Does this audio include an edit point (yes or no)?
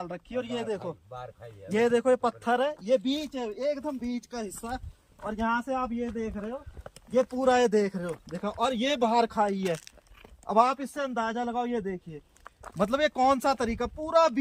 no